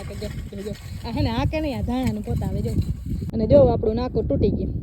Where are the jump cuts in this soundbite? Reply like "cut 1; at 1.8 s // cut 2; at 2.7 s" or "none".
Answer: cut 1; at 3.3 s